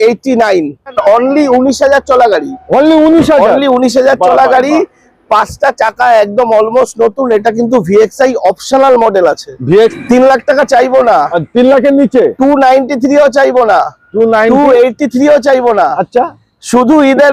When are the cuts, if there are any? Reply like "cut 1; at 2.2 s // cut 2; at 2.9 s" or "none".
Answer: cut 1; at 1.0 s // cut 2; at 9.9 s